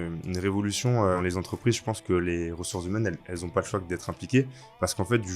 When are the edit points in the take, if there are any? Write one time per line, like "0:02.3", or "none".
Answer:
0:01.2